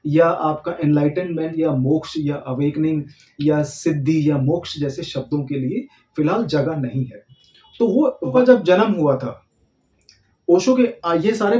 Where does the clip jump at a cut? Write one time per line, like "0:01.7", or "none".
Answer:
0:08.3